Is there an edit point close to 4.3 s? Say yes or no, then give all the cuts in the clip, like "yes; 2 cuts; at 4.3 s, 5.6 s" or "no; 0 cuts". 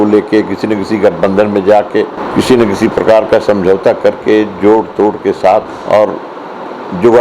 no; 2 cuts; at 2.2 s, 5.7 s